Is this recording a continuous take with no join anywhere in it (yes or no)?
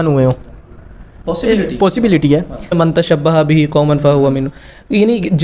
no